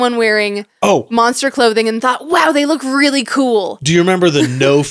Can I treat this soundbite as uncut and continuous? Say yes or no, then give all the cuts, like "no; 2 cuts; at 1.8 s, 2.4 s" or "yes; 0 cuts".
yes; 0 cuts